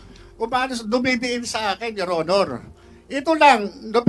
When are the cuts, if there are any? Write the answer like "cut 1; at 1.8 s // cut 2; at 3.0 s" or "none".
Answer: none